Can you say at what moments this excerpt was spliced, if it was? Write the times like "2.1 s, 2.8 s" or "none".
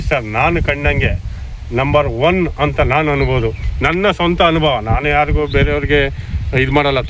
none